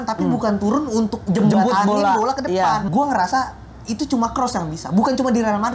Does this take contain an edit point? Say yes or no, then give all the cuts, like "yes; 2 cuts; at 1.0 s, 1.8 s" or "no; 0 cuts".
yes; 2 cuts; at 1.2 s, 2.9 s